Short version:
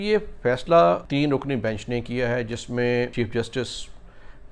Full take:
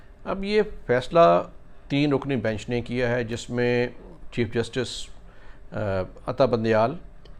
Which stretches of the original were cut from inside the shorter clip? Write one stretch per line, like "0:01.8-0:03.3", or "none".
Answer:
0:01.5-0:01.8
0:03.9-0:04.3